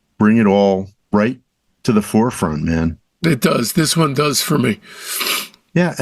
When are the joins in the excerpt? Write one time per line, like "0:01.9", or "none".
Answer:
0:00.9